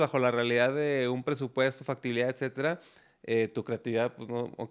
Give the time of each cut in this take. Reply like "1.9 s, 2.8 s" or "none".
none